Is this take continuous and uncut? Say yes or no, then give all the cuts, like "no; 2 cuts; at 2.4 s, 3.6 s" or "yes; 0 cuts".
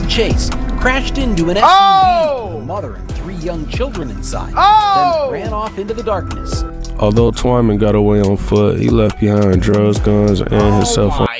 yes; 0 cuts